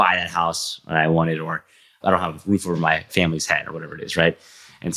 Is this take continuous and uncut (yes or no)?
no